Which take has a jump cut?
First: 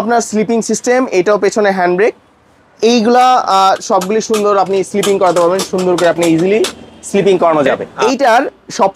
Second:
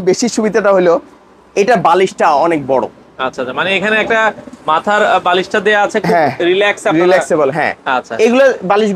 first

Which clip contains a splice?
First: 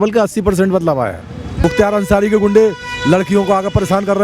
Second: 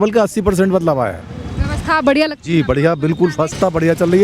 first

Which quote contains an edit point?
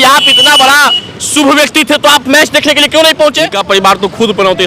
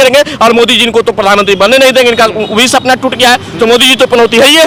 first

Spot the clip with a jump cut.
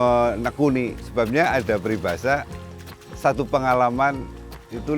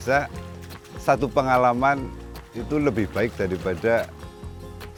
first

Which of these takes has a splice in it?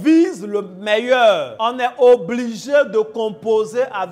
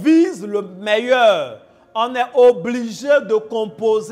first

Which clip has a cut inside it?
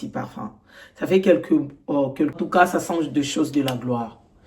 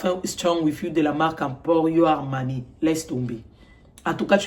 first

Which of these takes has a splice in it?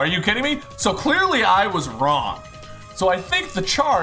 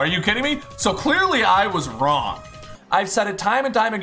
second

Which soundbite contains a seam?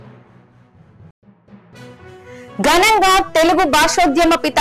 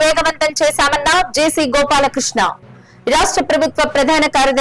first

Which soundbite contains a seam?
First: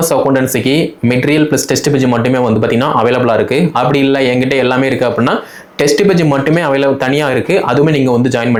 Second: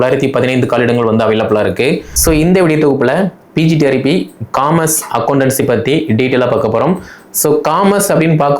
second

